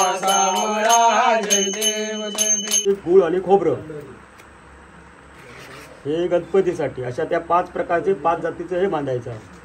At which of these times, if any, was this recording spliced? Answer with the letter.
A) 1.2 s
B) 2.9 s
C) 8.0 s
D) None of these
B